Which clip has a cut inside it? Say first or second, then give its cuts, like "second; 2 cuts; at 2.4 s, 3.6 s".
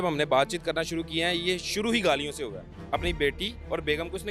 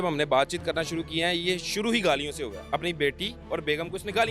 second; 1 cut; at 2.6 s